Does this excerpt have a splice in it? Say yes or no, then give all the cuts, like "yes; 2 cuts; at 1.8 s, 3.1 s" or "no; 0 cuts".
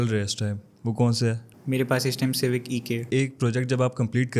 yes; 1 cut; at 3.0 s